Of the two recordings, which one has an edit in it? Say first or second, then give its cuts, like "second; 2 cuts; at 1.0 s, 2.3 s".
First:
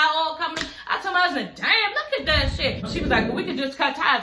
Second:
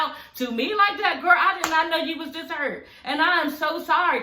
first; 1 cut; at 2.8 s